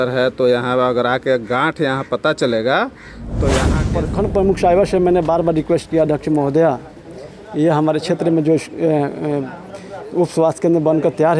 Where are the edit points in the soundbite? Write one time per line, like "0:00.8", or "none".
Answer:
0:03.6